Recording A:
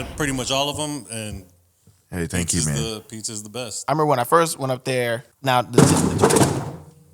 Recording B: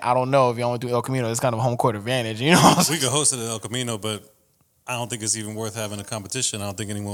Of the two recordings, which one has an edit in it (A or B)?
A